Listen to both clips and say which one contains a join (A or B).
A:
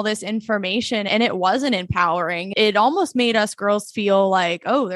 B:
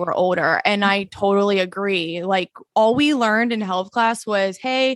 A